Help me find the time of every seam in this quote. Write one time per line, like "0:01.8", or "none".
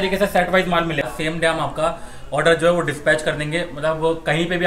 0:01.1